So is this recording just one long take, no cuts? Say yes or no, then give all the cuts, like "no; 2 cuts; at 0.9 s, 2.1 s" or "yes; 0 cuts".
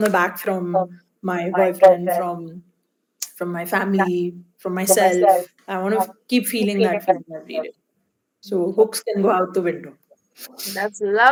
yes; 0 cuts